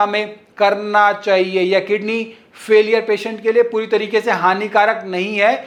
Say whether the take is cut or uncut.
uncut